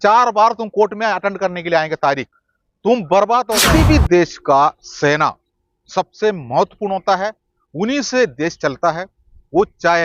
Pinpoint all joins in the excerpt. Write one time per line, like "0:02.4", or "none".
0:03.6